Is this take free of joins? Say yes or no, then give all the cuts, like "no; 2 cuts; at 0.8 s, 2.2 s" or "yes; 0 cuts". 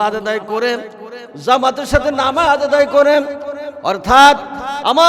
yes; 0 cuts